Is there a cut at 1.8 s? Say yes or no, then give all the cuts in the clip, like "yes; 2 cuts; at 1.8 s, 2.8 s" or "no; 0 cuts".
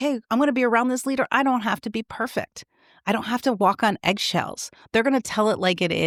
no; 0 cuts